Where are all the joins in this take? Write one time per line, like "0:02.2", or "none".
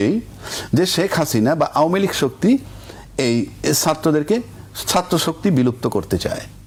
none